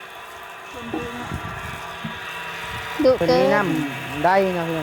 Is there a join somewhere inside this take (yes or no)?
yes